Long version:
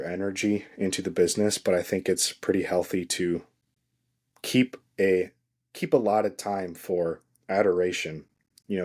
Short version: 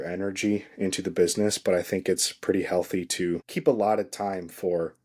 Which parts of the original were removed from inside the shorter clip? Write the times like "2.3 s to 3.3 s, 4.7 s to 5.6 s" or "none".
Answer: 3.5 s to 5.8 s

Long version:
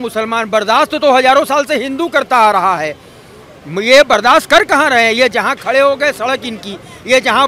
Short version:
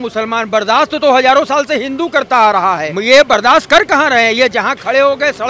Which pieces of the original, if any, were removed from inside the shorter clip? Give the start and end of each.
2.9 s to 3.7 s

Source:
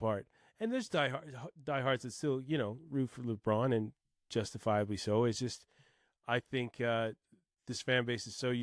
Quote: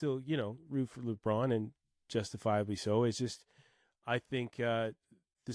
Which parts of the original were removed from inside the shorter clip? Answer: none

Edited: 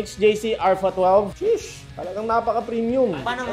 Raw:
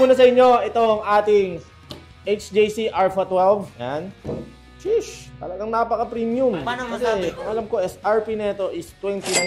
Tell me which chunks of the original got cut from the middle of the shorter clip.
3.7 s to 4.8 s

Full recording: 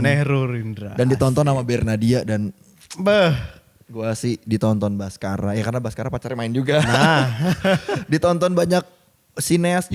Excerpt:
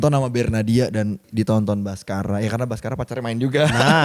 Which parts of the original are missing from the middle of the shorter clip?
2.6 s to 4.4 s

